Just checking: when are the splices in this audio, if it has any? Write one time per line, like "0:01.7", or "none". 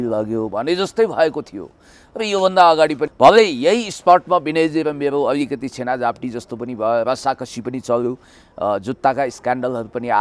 0:03.1